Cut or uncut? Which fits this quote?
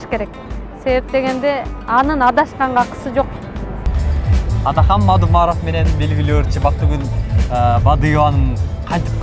cut